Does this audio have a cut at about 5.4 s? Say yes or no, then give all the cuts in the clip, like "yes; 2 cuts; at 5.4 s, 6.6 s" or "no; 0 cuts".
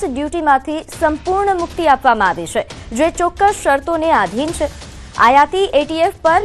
no; 1 cut; at 3.9 s